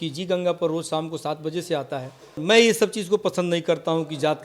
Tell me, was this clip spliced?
yes; 1 cut; at 2.4 s

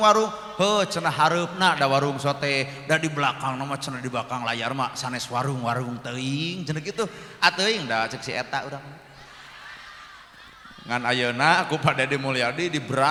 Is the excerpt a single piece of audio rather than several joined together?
yes; 0 cuts

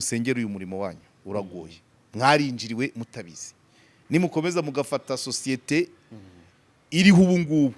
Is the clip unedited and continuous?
yes; 0 cuts

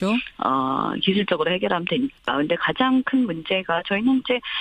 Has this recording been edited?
no; 0 cuts

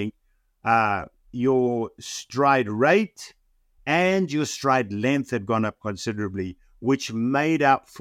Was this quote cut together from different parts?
yes; 1 cut; at 3.7 s

